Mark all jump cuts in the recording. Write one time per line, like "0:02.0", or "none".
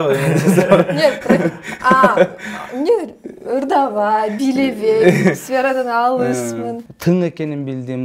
0:06.9